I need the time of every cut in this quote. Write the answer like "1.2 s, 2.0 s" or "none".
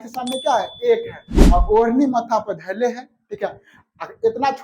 1.3 s